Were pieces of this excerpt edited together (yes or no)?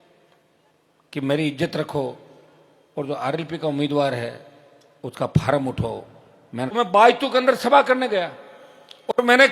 yes